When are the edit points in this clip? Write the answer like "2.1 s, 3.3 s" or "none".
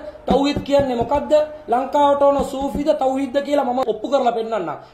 3.8 s